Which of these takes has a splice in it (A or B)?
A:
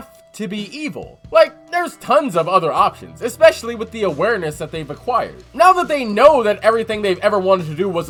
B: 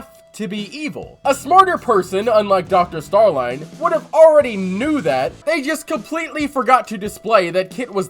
B